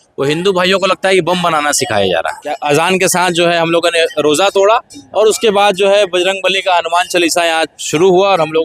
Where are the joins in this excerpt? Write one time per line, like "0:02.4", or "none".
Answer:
0:02.4